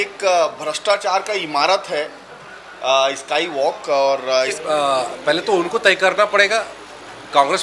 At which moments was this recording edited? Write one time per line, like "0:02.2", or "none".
0:04.6

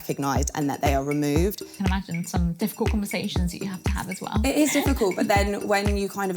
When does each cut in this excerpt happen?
0:01.7

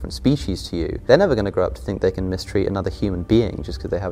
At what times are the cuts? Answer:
0:01.0

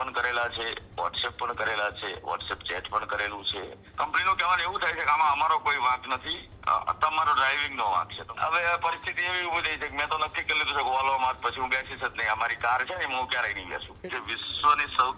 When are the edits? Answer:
0:03.8
0:08.2
0:14.0

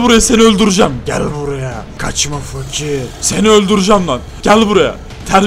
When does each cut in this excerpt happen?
0:01.9
0:03.2
0:04.3

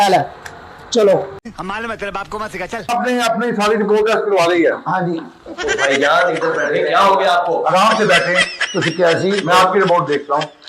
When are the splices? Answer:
0:01.4
0:02.9

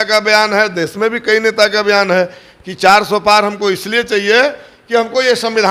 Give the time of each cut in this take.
none

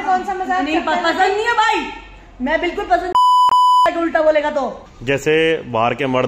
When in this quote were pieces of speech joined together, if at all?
0:03.1
0:03.9
0:04.9

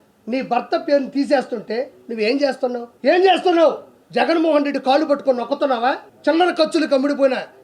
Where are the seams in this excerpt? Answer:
0:02.9
0:06.1

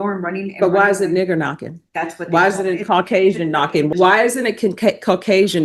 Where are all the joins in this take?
0:03.9

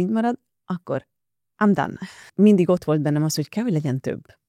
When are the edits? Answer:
0:02.2

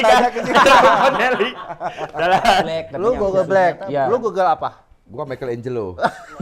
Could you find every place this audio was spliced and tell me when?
0:02.8

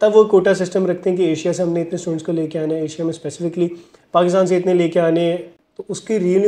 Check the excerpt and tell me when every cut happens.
0:05.5

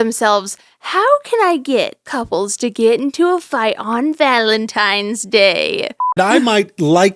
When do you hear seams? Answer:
0:02.1
0:06.1

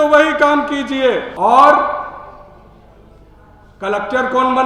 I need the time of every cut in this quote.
0:01.3

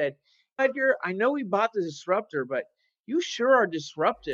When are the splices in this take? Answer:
none

